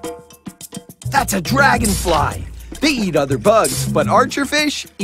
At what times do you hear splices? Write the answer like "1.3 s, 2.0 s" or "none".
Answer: 1.1 s